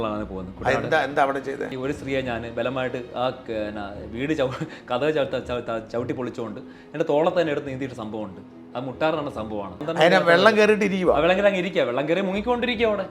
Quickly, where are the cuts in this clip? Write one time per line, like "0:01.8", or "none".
0:01.7
0:09.8